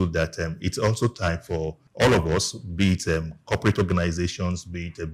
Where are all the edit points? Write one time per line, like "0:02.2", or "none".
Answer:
0:01.8